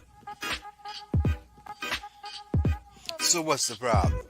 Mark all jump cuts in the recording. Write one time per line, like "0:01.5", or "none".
0:01.3